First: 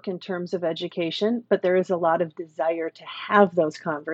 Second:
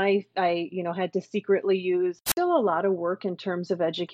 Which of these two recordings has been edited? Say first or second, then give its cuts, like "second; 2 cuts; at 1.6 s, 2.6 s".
second; 1 cut; at 2.2 s